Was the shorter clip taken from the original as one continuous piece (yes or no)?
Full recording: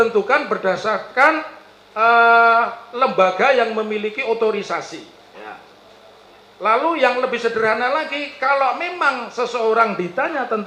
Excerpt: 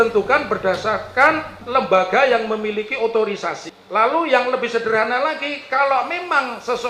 no